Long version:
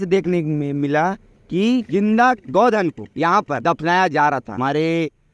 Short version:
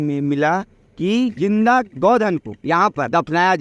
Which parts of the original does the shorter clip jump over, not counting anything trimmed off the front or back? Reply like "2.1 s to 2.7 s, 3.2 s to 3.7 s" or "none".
none